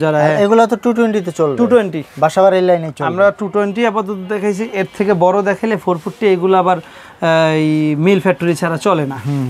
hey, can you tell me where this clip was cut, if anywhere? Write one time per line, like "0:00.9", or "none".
none

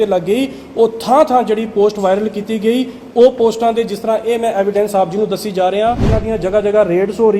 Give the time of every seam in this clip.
0:06.1

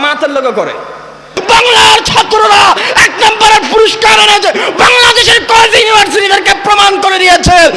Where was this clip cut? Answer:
0:01.4

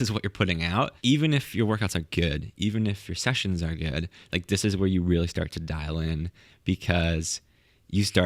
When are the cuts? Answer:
0:00.9

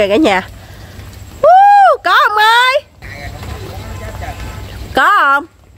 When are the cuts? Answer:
0:03.0

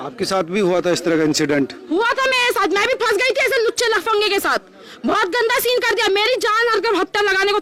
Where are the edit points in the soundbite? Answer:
none

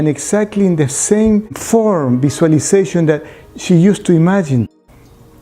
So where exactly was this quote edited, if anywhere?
0:01.6

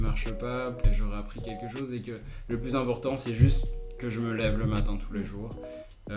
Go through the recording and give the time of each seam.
none

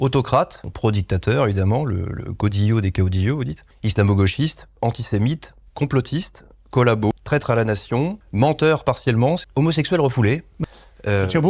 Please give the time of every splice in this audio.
0:07.1
0:09.5

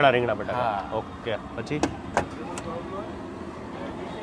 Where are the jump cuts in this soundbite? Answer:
none

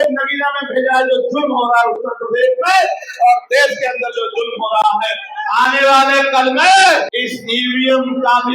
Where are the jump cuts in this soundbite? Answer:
0:05.3
0:07.1

